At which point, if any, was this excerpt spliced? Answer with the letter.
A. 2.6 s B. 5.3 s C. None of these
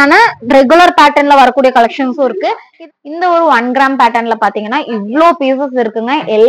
A